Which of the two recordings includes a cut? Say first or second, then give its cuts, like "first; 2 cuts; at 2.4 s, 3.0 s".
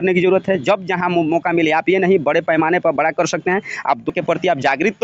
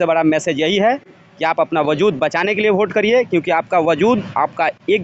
first; 1 cut; at 4.1 s